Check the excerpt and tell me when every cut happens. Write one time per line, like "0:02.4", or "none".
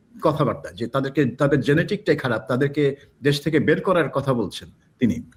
none